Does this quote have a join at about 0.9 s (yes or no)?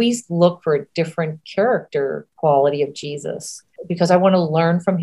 no